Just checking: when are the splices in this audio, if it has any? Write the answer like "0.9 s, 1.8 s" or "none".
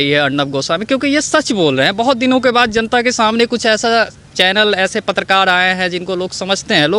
none